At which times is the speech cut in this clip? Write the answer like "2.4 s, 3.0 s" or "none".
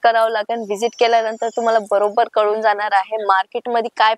none